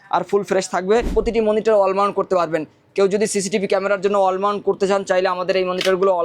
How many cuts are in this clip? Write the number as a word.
one